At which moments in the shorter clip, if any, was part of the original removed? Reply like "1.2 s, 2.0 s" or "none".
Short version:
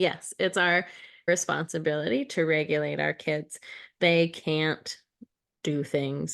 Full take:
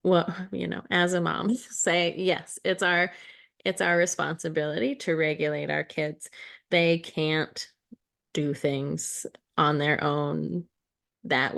1.3 s